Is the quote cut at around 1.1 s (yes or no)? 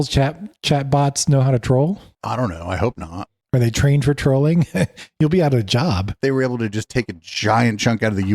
no